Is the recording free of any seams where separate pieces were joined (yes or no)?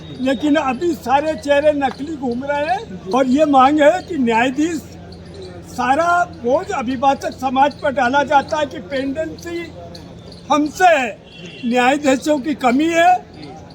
no